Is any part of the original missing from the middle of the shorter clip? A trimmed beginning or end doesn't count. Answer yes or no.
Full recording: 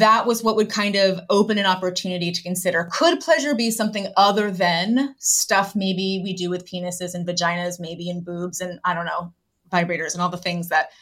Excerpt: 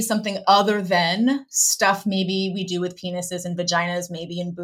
no